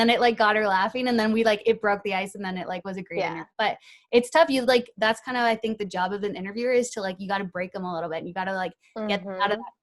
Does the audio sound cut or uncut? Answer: cut